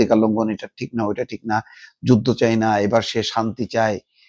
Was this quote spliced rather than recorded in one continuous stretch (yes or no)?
no